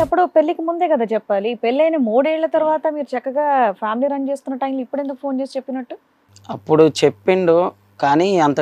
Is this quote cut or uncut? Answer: uncut